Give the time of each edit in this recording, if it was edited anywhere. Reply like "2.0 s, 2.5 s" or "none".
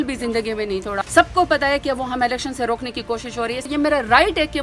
1.0 s, 3.7 s